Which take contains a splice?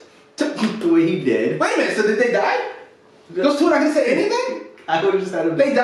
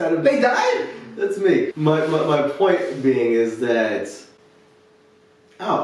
second; 1 cut; at 1.7 s

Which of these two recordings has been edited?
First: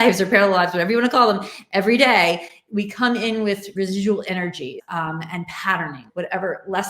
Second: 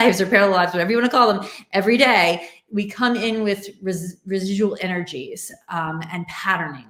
first; 3 cuts; at 3.7 s, 4.8 s, 6.0 s

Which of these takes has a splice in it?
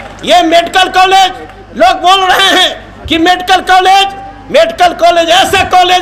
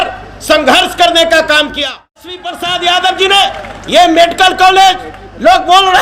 second; 1 cut; at 2.5 s

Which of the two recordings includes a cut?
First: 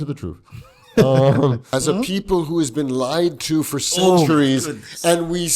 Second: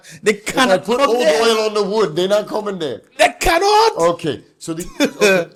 first; 1 cut; at 1.8 s

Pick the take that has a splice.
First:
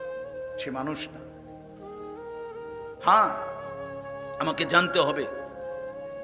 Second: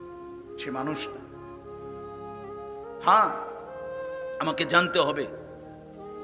second; 1 cut; at 5.3 s

